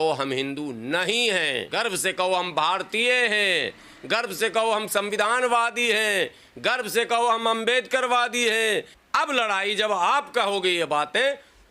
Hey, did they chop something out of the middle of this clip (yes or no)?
yes